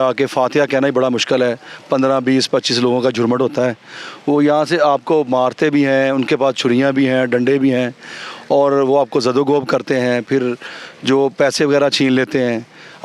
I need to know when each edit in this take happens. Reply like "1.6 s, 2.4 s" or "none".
none